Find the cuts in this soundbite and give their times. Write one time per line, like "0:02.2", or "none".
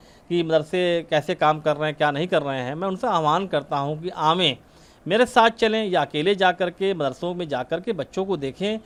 none